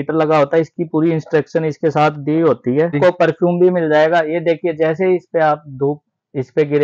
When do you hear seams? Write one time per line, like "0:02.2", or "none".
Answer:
0:03.0